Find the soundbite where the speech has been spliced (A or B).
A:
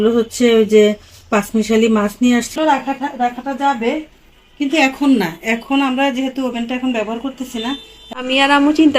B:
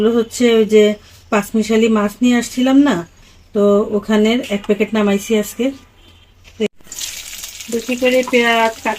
A